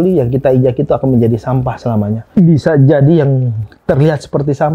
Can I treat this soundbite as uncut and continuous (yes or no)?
no